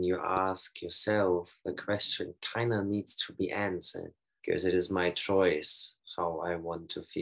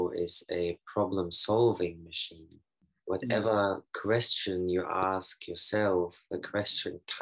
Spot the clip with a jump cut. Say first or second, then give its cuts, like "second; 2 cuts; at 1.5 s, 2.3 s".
first; 1 cut; at 4.2 s